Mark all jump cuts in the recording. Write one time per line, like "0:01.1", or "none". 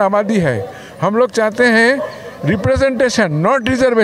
none